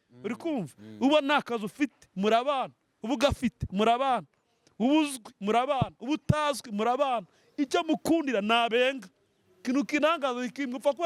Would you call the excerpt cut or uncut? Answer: uncut